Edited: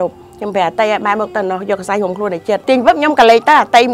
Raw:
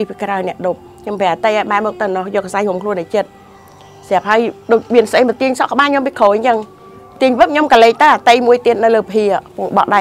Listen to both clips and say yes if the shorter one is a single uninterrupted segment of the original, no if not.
no